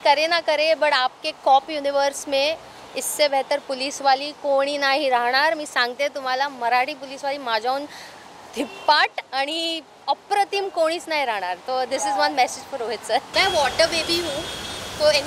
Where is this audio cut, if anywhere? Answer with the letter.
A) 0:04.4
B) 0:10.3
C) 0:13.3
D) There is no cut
C